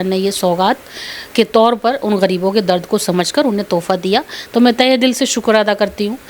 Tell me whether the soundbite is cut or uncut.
uncut